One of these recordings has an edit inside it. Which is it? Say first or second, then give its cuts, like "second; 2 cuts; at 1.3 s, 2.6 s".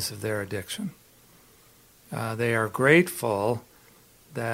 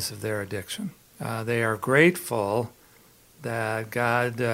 second; 1 cut; at 1.1 s